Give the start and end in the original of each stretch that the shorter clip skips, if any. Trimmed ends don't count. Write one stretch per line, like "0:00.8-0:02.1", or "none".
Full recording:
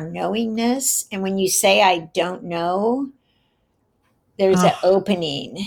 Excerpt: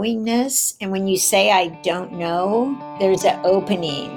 0:03.2-0:04.3